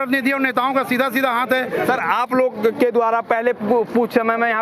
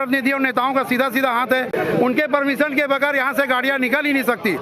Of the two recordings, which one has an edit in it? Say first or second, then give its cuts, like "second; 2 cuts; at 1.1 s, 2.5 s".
first; 1 cut; at 1.7 s